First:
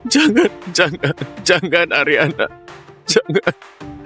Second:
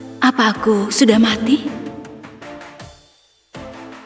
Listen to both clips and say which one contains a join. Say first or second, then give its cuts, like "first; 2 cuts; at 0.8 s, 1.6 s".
second; 1 cut; at 2.1 s